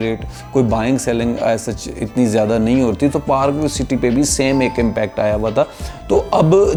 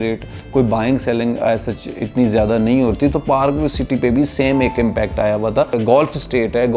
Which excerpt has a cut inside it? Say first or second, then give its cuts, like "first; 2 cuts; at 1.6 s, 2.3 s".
second; 1 cut; at 5.8 s